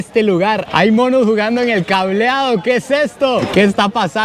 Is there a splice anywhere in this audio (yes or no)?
no